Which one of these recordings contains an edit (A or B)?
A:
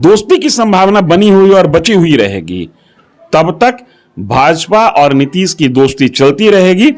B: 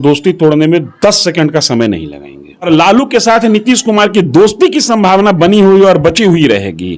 B